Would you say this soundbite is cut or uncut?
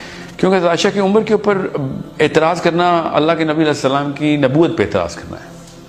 uncut